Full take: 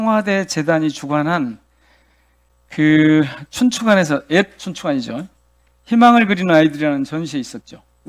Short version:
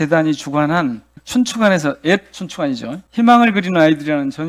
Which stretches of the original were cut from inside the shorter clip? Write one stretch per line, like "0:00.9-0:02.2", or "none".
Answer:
0:01.7-0:03.4
0:05.2-0:05.7